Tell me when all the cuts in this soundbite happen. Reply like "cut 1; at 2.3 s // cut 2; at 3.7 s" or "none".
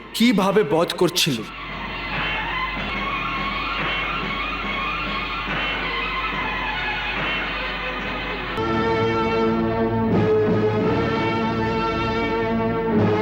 cut 1; at 2.9 s // cut 2; at 8.6 s